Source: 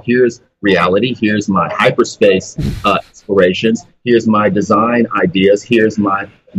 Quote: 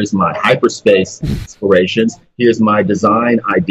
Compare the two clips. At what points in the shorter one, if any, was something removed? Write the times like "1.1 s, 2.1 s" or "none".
1.4 s